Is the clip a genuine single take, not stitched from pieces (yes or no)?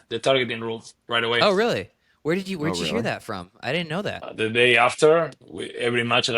no